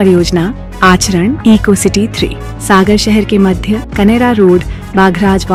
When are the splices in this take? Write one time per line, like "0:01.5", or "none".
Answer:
none

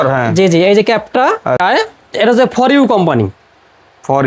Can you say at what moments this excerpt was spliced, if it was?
0:01.6

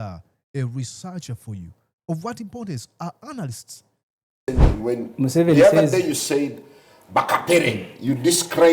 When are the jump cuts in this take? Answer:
0:04.5

